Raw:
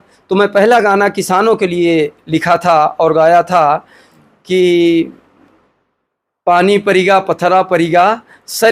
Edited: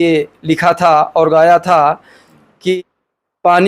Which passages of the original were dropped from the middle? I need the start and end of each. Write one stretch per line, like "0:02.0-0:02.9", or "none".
0:04.6-0:05.8

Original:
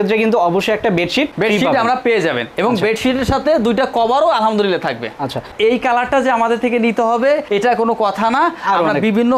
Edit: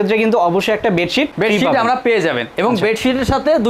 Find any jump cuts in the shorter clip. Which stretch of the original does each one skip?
none

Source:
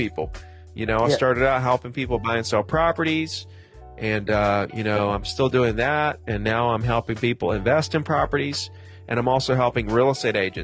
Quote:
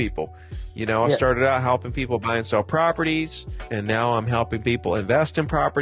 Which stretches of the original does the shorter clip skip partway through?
0:03.7-0:06.3

